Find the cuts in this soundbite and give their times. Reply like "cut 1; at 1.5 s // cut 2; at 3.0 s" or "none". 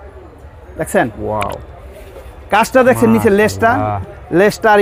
none